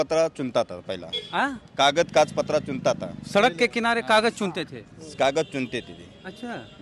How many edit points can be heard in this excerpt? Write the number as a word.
zero